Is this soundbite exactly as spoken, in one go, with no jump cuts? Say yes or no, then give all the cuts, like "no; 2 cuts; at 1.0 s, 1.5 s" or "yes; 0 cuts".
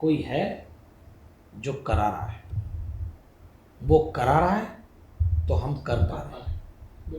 yes; 0 cuts